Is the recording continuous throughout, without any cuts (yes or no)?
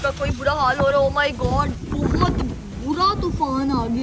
no